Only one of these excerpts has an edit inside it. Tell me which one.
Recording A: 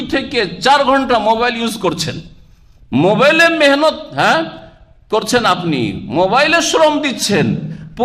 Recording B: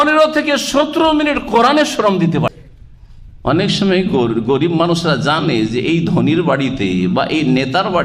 B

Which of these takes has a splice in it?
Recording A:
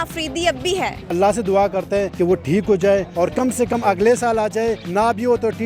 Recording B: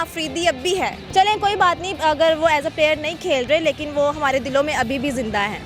A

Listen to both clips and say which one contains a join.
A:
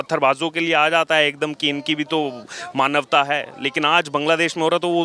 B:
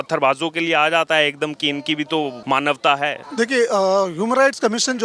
B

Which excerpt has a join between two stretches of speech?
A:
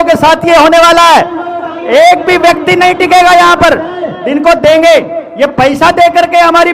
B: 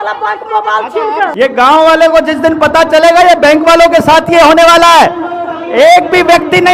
B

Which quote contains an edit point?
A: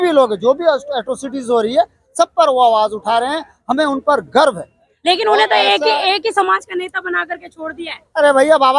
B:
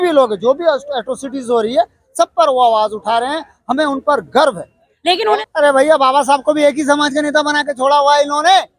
B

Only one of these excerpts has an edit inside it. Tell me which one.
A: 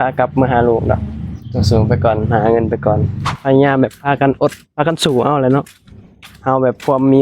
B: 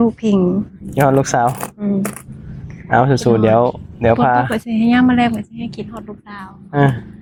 A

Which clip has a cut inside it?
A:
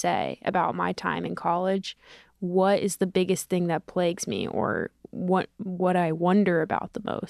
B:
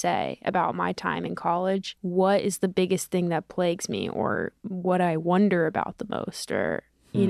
B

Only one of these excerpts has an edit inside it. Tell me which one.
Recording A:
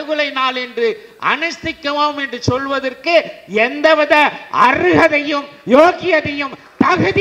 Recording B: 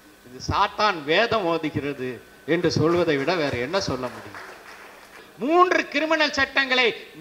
B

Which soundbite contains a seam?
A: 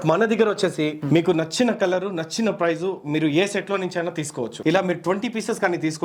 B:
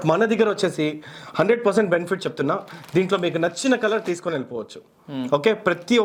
A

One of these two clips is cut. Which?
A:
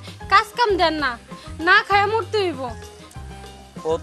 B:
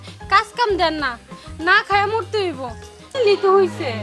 B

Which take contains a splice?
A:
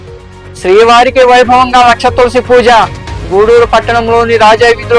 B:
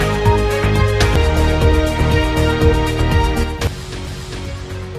B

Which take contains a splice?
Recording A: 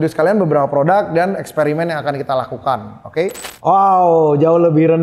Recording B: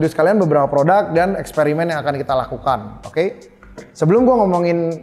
A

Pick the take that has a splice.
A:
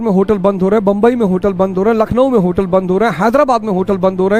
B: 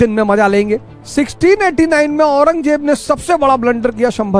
B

